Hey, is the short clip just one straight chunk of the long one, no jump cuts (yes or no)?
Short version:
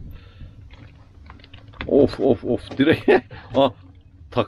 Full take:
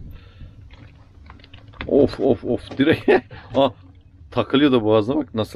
yes